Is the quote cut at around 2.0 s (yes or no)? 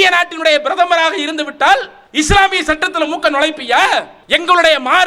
yes